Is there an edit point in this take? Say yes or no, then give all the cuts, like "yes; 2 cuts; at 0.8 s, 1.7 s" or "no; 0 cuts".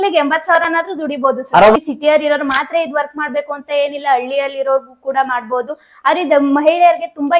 yes; 1 cut; at 1.8 s